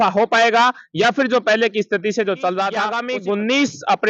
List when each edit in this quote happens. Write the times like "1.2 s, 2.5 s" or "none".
3.0 s